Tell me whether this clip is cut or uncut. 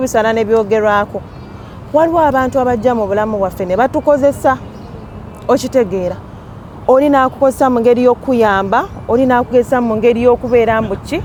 uncut